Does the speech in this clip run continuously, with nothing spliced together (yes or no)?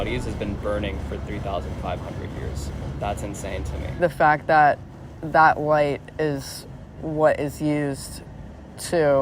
no